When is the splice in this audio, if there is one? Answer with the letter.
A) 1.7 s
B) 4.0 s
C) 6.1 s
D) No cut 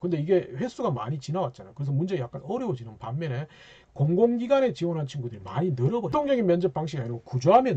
C